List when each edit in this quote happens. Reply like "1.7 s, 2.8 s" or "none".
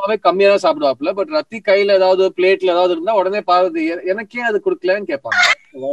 none